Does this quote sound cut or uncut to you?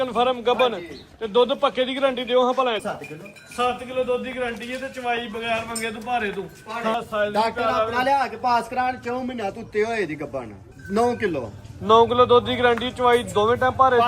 cut